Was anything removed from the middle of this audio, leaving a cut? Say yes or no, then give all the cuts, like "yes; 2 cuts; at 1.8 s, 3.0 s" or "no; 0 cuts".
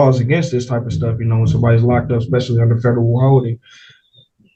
no; 0 cuts